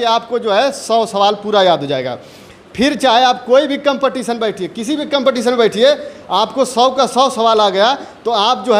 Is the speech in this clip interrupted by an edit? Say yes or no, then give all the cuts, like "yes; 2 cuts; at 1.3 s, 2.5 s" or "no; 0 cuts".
no; 0 cuts